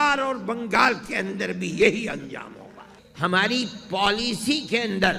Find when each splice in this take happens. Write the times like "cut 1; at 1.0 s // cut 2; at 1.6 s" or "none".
cut 1; at 2.7 s